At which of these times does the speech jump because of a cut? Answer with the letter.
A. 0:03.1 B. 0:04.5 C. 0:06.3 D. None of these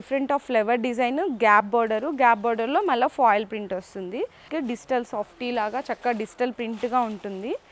B